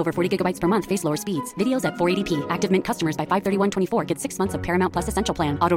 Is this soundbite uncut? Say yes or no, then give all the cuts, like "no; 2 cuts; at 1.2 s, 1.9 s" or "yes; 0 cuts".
yes; 0 cuts